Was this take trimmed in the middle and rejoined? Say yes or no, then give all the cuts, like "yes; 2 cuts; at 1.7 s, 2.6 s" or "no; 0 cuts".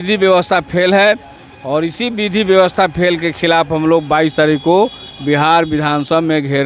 no; 0 cuts